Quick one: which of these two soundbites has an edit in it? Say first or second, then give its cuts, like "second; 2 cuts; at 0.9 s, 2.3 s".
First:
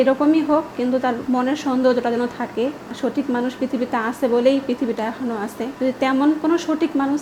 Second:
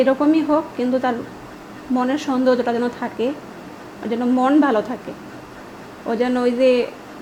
first; 3 cuts; at 1.2 s, 2.9 s, 5.6 s